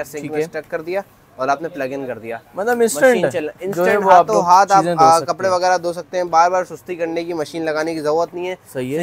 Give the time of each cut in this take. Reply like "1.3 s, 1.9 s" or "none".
none